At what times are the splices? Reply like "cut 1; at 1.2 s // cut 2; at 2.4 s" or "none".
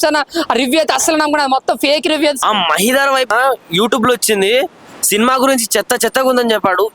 cut 1; at 2.4 s // cut 2; at 3.3 s